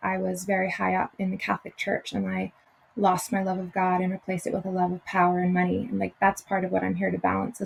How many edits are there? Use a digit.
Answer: 0